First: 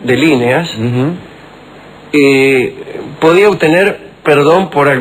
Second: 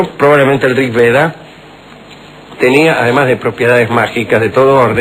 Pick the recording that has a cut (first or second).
second